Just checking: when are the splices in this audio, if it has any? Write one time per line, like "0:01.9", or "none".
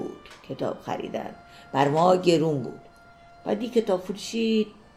none

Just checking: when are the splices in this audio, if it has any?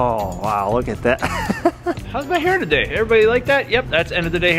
0:02.0

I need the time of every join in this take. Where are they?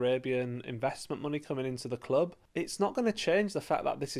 0:02.4

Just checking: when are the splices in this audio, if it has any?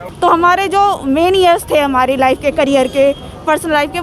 none

